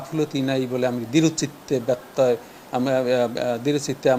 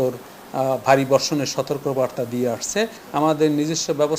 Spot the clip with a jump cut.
second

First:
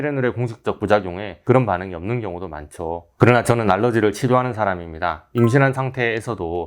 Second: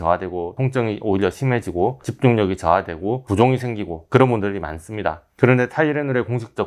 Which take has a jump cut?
first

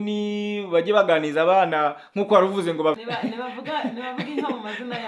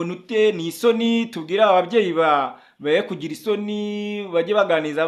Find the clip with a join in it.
first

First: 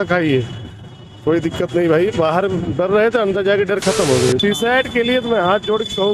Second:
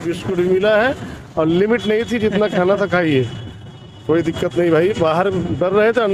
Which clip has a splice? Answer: first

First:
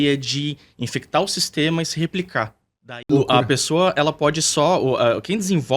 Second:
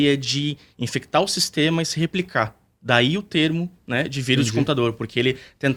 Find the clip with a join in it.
first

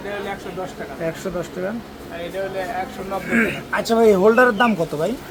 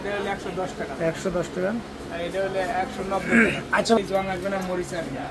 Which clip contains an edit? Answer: second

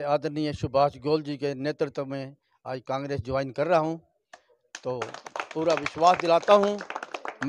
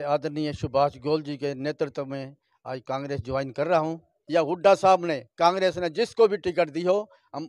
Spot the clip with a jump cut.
second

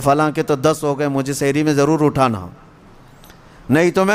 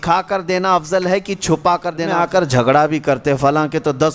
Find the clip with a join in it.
second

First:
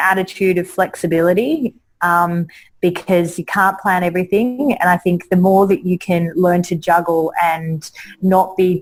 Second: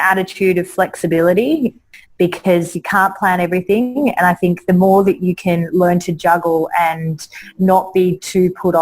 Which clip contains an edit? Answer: second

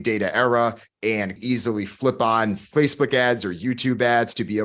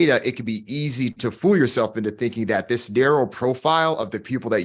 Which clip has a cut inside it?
first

